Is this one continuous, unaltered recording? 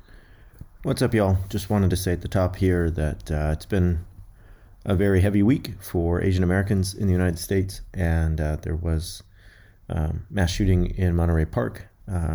yes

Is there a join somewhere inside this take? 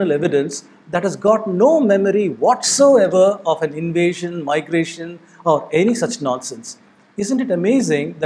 no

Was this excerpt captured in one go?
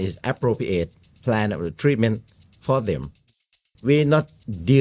no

